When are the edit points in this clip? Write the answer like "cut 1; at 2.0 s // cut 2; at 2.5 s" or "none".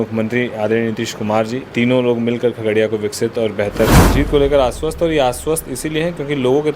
cut 1; at 1.6 s // cut 2; at 4.0 s